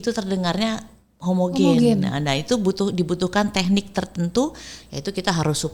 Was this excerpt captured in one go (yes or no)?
yes